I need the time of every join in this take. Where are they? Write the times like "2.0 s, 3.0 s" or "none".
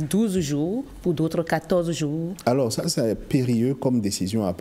none